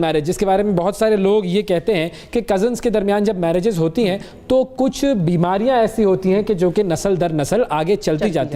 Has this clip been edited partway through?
no; 0 cuts

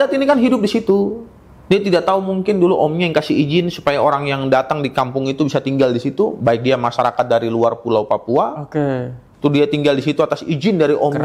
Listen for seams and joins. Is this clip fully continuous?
yes; 0 cuts

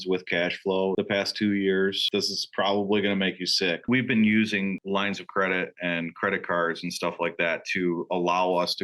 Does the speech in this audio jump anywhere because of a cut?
yes; 3 cuts; at 0.9 s, 2.0 s, 3.8 s

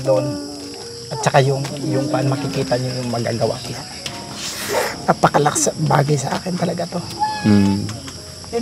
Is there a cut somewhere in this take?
yes; 1 cut; at 4.1 s

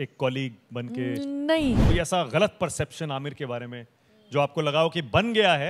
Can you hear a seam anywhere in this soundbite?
yes; 1 cut; at 1.8 s

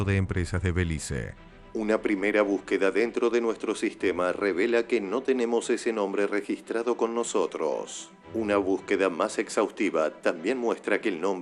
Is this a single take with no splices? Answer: yes; 0 cuts

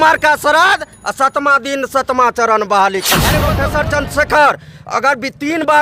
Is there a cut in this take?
yes; 1 cut; at 3.6 s

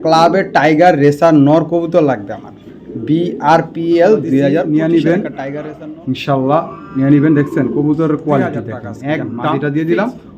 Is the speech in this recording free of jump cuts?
no; 2 cuts; at 4.7 s, 9.4 s

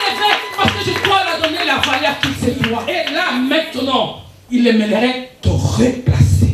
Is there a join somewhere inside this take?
yes; 1 cut; at 2.9 s

